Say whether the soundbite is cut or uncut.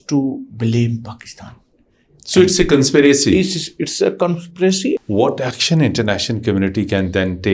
cut